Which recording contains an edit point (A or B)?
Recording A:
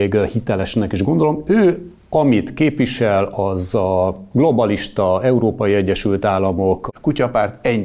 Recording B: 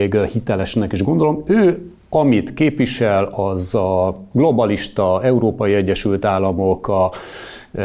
A